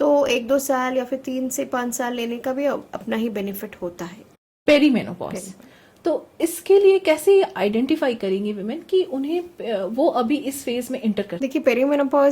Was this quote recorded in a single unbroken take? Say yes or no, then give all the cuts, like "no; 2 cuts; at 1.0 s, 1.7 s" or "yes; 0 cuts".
no; 2 cuts; at 4.4 s, 11.3 s